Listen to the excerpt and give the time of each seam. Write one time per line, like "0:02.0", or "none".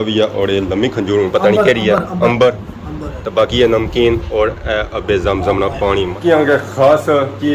0:06.2